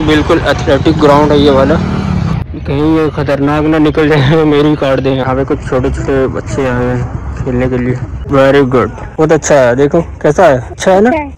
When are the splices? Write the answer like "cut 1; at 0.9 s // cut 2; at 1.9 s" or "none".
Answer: cut 1; at 5.2 s // cut 2; at 8.1 s